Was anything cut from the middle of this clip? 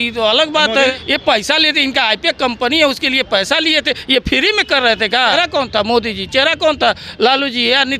yes; 2 cuts; at 0.9 s, 5.3 s

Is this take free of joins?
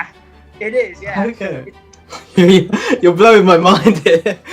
no; 1 cut; at 2.0 s

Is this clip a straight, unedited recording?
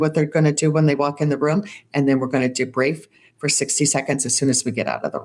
yes; 0 cuts

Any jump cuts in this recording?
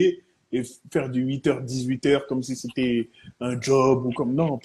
no; 0 cuts

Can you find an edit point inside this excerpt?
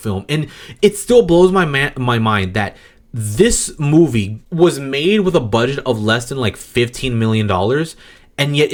no; 0 cuts

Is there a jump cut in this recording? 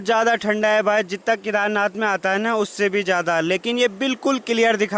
no; 0 cuts

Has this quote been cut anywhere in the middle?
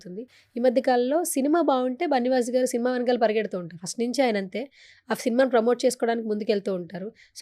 no; 0 cuts

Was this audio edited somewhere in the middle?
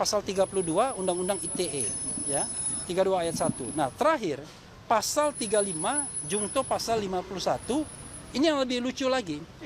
no; 0 cuts

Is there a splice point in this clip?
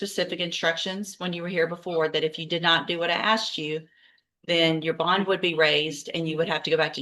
no; 0 cuts

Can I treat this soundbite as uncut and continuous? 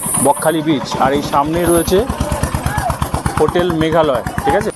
yes; 0 cuts

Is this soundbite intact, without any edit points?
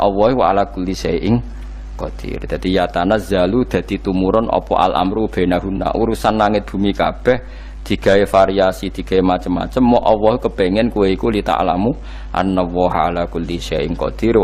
yes; 0 cuts

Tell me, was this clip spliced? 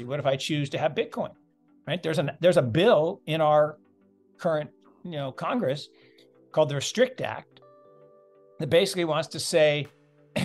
no; 0 cuts

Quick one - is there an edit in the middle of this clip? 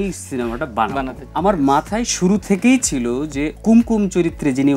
yes; 2 cuts; at 1.2 s, 3.5 s

